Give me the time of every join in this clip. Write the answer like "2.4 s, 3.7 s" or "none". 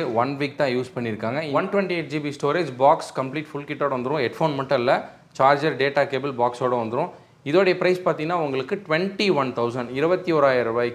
1.5 s